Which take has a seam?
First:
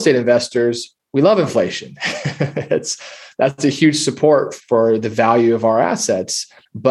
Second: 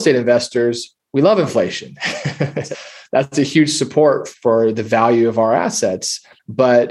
second; 1 cut; at 2.7 s

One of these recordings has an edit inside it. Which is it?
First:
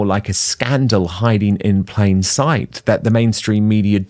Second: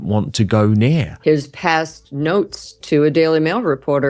second; 1 cut; at 1.1 s

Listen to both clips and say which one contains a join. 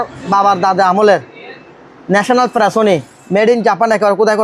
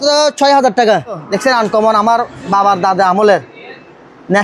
second; 1 cut; at 1.3 s

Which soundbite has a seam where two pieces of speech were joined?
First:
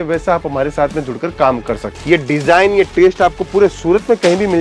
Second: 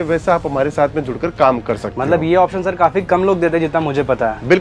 first; 1 cut; at 1.9 s

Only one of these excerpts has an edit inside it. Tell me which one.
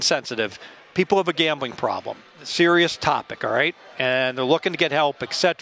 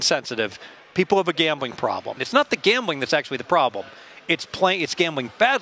second; 1 cut; at 2.2 s

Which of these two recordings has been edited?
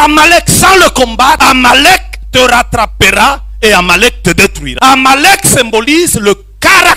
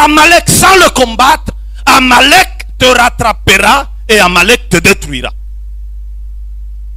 first; 2 cuts; at 1.4 s, 4.6 s

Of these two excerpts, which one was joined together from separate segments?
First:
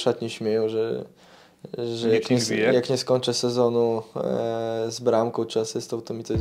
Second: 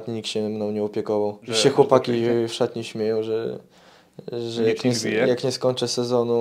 second; 1 cut; at 1.4 s

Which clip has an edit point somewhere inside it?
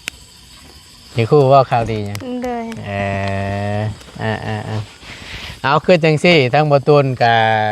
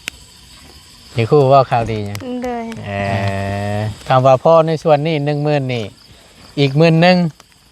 second; 1 cut; at 4.0 s

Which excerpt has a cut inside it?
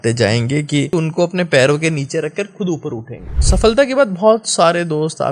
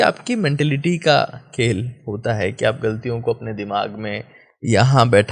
first; 2 cuts; at 0.9 s, 3.4 s

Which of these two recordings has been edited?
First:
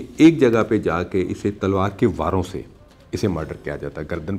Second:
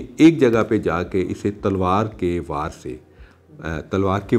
first; 1 cut; at 1.6 s

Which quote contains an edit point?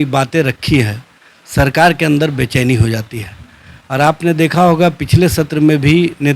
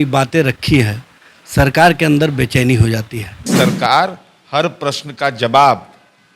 second; 1 cut; at 3.5 s

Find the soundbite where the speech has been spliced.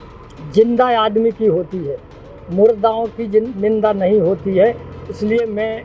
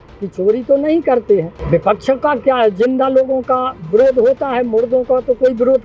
second; 1 cut; at 1.6 s

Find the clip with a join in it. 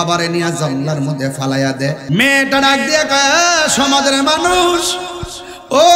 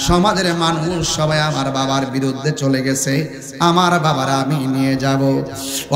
first; 1 cut; at 2.0 s

